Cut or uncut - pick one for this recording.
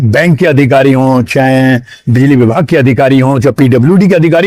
uncut